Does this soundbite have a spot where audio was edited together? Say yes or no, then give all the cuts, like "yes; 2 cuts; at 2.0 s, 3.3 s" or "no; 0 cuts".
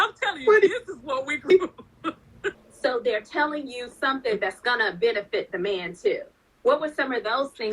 yes; 1 cut; at 2.6 s